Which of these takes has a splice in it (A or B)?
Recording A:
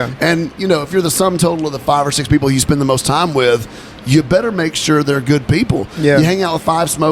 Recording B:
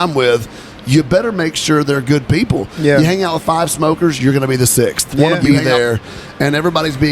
B